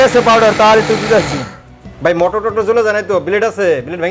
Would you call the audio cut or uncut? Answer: cut